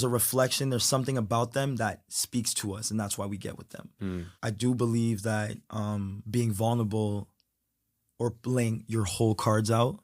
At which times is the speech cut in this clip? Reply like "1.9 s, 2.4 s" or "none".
4.3 s, 6.2 s